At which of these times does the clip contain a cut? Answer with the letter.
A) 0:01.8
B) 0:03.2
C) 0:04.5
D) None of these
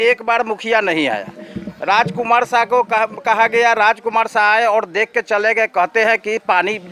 D